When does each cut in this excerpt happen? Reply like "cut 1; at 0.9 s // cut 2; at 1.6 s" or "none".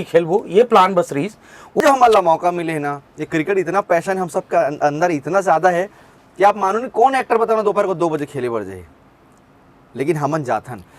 cut 1; at 1.8 s